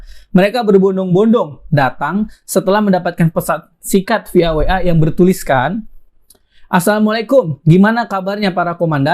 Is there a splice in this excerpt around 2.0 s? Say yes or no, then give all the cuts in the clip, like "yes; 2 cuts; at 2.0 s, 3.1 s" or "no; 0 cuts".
no; 0 cuts